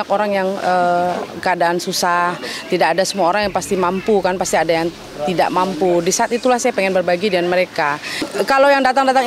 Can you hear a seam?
no; 0 cuts

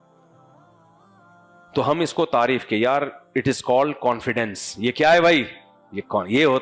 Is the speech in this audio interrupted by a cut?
no; 0 cuts

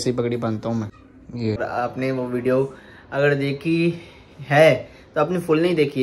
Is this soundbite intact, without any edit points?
no; 1 cut; at 1.6 s

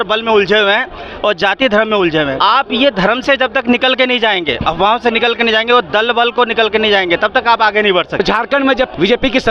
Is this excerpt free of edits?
no; 2 cuts; at 2.4 s, 8.2 s

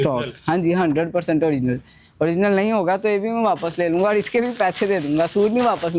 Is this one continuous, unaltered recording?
yes; 0 cuts

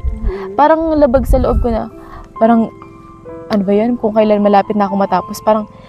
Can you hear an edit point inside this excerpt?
no; 0 cuts

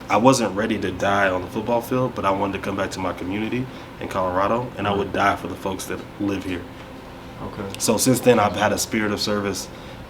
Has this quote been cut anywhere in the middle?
no; 0 cuts

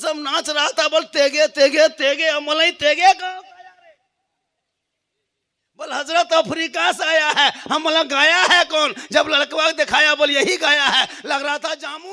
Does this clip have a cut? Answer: no; 0 cuts

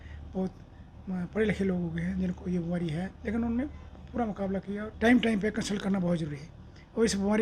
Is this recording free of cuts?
no; 2 cuts; at 3.1 s, 4.9 s

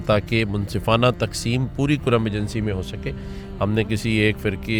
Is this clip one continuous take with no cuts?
yes; 0 cuts

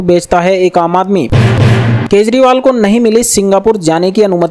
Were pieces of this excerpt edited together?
yes; 1 cut; at 1.3 s

